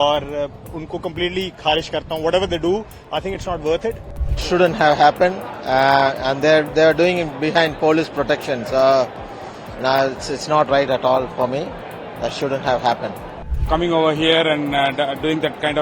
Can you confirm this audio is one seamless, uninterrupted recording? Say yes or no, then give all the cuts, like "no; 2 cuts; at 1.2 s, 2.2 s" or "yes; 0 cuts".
no; 2 cuts; at 4.4 s, 13.5 s